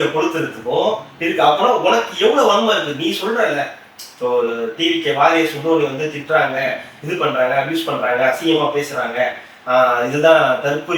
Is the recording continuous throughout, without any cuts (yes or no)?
yes